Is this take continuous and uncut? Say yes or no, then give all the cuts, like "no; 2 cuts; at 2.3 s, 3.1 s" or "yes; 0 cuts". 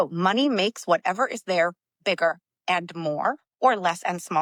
yes; 0 cuts